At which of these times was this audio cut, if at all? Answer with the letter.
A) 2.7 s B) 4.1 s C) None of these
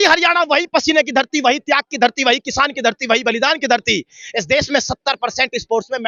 C